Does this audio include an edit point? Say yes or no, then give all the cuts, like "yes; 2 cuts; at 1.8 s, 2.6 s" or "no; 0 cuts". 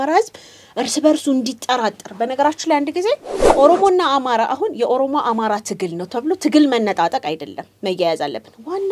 yes; 1 cut; at 3.4 s